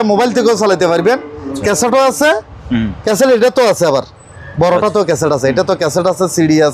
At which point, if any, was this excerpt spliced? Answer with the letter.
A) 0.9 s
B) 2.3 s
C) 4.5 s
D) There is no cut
D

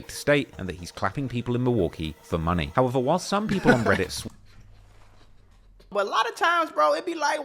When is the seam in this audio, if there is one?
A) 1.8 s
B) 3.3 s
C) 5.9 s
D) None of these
C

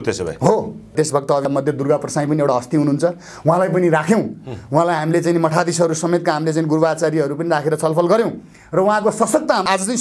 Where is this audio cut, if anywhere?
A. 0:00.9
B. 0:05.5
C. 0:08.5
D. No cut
A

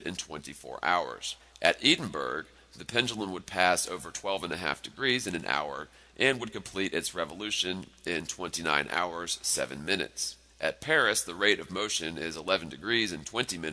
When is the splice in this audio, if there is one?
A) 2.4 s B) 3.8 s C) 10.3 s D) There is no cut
A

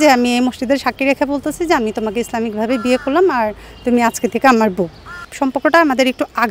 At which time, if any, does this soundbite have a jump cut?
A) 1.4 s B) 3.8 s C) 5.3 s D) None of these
C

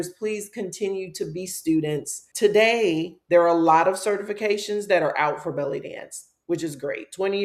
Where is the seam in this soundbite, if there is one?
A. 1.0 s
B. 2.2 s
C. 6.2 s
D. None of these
B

